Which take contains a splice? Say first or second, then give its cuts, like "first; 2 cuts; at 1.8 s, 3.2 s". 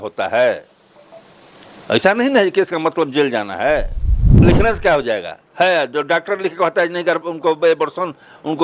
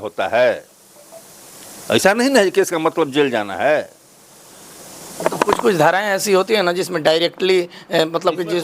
first; 1 cut; at 4.4 s